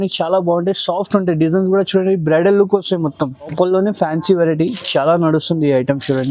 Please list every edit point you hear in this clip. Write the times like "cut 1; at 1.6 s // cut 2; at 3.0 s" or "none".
cut 1; at 3.5 s